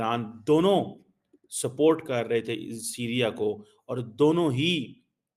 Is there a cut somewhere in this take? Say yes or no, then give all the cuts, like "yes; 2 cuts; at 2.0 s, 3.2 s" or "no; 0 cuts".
no; 0 cuts